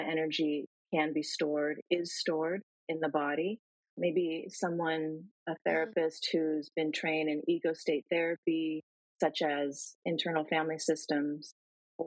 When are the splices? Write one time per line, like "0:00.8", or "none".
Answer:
0:03.9